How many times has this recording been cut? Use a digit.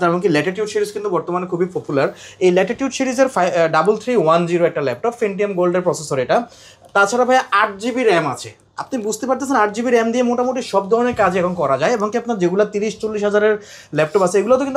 0